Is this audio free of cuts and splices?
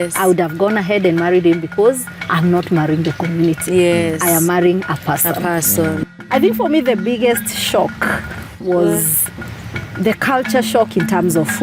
no; 1 cut; at 6.0 s

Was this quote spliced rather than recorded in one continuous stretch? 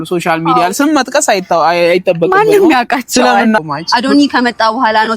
yes; 1 cut; at 3.6 s

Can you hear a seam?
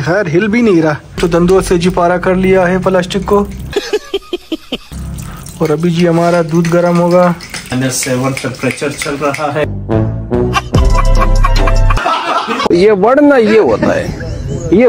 yes; 2 cuts; at 1.2 s, 7.7 s

